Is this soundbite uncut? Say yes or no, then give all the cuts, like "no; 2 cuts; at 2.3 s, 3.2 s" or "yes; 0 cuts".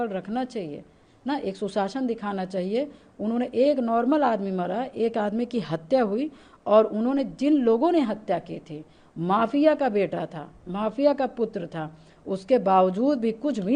yes; 0 cuts